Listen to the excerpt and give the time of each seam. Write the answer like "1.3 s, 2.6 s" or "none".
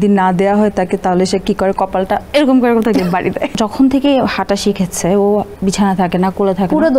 2.2 s, 3.5 s, 5.5 s